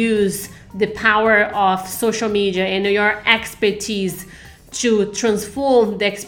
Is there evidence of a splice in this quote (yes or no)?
no